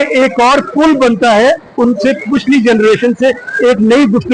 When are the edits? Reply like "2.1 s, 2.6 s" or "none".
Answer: none